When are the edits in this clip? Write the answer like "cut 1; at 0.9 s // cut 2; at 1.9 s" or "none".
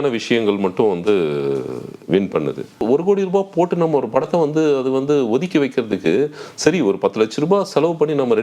cut 1; at 2.8 s

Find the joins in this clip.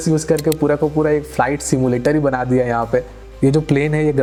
none

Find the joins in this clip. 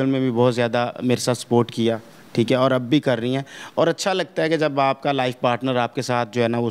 none

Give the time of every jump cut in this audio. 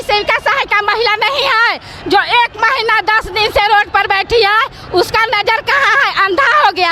none

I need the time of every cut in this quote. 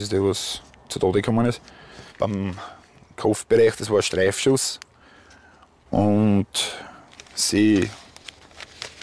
cut 1; at 2.1 s

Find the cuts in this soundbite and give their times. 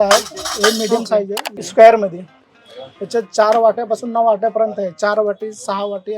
cut 1; at 1.6 s

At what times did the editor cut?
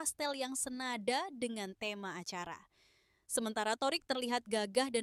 none

